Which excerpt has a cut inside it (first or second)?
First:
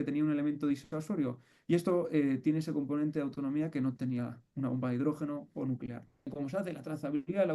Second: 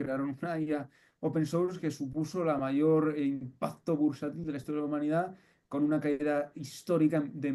first